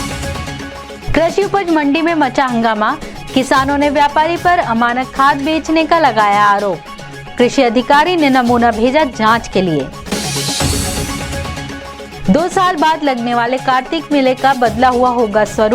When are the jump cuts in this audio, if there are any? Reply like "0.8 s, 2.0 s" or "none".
1.0 s